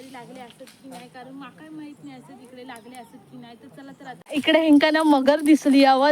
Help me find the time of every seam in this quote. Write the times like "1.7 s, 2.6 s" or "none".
4.2 s